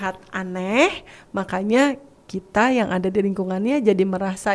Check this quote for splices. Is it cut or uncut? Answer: uncut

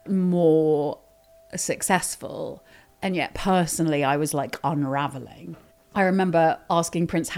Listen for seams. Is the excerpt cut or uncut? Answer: uncut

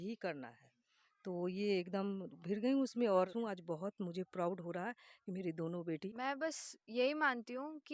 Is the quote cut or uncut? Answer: cut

